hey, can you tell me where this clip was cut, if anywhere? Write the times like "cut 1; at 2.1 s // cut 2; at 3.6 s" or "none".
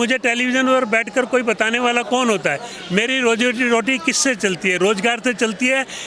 cut 1; at 2.7 s